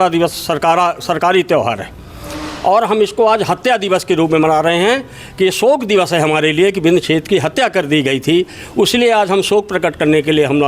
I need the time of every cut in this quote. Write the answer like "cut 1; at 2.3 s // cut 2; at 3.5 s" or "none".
none